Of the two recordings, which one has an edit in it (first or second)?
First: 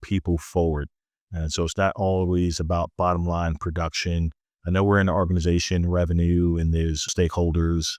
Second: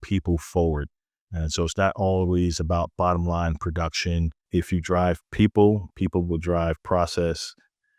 second